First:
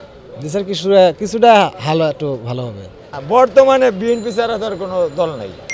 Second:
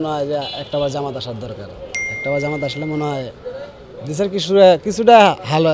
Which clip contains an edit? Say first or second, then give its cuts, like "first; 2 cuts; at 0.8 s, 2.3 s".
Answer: first; 1 cut; at 3.1 s